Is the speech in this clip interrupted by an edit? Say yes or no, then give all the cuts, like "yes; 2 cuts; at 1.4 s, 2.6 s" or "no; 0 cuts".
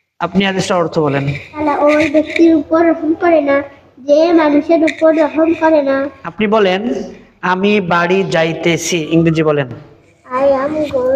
yes; 2 cuts; at 6.2 s, 6.8 s